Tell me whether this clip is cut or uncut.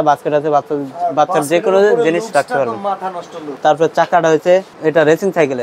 cut